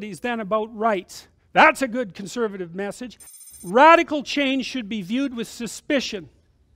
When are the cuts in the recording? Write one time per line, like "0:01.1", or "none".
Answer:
0:03.3

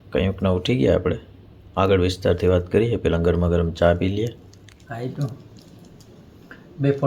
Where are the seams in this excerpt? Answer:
0:04.4

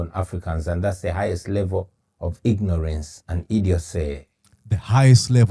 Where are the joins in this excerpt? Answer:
0:04.3

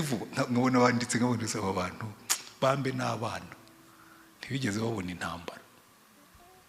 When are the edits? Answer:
none

